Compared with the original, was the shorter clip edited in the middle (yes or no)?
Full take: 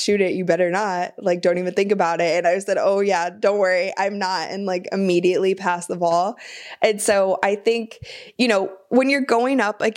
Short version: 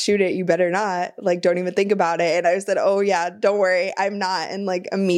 no